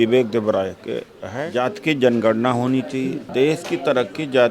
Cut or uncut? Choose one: cut